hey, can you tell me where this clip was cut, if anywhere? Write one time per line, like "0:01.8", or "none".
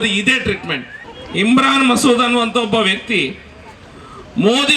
0:00.9